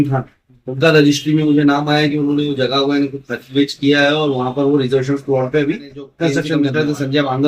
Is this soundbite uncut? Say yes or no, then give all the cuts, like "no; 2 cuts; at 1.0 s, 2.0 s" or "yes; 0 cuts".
no; 1 cut; at 6.5 s